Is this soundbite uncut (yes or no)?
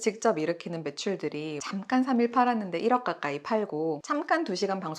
no